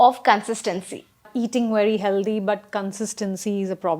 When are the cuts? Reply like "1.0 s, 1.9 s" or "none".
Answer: 1.3 s